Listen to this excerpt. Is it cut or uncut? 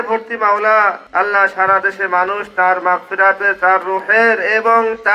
cut